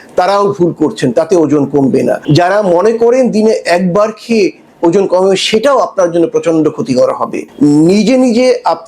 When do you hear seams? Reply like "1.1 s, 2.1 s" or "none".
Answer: 2.2 s, 7.4 s